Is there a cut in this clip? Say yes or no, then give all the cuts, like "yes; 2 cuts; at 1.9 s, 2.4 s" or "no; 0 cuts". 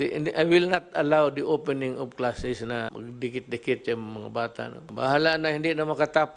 yes; 2 cuts; at 2.9 s, 4.8 s